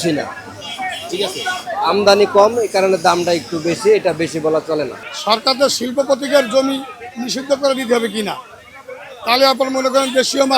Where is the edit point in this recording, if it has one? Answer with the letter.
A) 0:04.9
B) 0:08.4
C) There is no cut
A